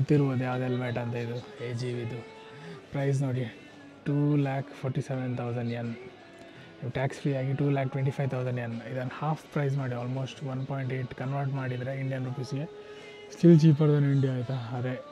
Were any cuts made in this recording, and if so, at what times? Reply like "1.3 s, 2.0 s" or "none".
none